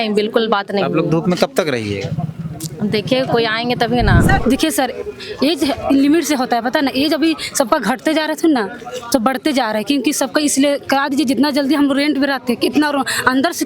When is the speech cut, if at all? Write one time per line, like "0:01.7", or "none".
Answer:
0:04.4